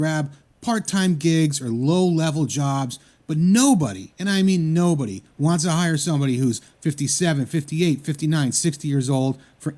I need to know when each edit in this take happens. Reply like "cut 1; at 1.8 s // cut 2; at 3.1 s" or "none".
none